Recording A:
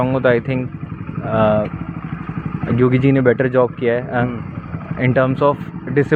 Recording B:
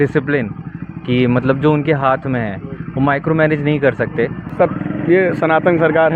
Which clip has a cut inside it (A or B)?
B